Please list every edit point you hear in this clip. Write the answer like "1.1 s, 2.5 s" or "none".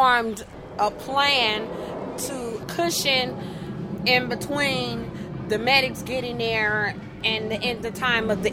7.1 s